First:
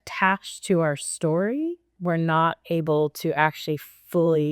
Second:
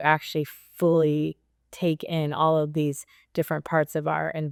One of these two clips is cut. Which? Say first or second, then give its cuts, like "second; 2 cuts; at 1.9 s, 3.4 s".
first; 1 cut; at 1.9 s